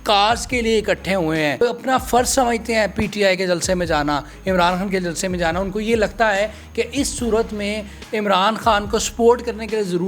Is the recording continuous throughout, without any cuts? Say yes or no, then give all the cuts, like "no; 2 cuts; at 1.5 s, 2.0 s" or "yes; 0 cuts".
no; 1 cut; at 1.6 s